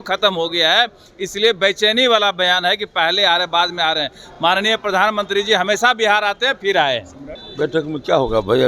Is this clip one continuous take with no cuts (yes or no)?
yes